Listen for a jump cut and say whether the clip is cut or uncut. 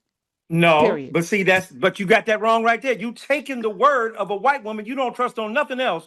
uncut